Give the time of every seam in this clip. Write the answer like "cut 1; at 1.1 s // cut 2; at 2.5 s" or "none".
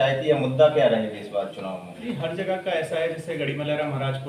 none